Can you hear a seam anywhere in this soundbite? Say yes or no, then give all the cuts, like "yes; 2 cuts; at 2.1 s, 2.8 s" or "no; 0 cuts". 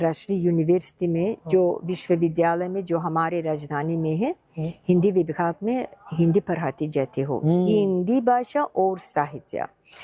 no; 0 cuts